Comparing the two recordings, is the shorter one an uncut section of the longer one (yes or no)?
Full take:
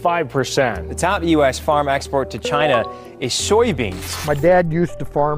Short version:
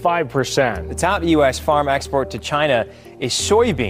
yes